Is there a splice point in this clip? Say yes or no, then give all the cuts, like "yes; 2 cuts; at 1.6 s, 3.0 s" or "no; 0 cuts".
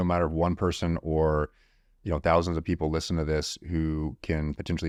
no; 0 cuts